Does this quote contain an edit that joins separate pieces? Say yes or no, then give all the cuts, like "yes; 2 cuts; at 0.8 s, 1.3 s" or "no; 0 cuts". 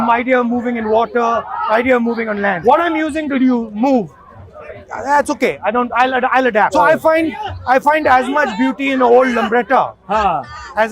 yes; 2 cuts; at 2.6 s, 6.7 s